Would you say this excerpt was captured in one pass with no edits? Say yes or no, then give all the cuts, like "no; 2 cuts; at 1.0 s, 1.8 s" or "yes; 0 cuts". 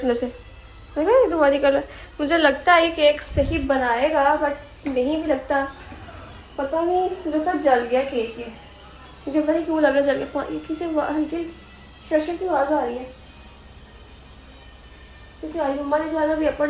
yes; 0 cuts